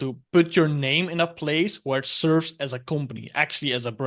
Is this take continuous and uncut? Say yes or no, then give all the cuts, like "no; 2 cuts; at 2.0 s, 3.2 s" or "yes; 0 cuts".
yes; 0 cuts